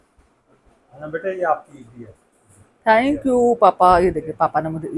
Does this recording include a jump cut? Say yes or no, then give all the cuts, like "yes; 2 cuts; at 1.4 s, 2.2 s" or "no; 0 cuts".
no; 0 cuts